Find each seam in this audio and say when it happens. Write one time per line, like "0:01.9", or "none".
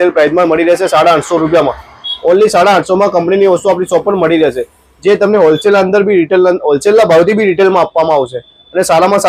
none